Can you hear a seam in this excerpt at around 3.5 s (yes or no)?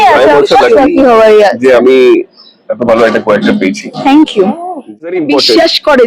no